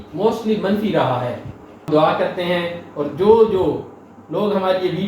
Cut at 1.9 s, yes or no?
yes